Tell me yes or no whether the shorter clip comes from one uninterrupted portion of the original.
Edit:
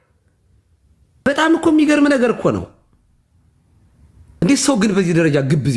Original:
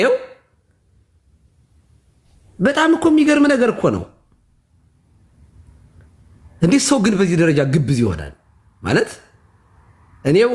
no